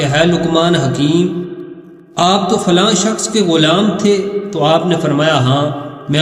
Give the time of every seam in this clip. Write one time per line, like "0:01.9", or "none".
none